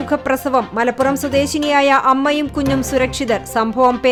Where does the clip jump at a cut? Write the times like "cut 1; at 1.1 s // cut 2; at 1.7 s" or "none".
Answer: none